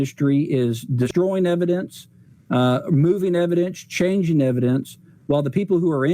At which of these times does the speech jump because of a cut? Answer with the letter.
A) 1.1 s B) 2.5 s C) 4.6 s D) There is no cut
A